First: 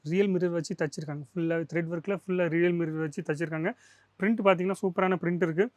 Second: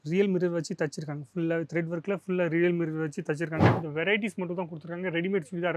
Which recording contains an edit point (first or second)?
second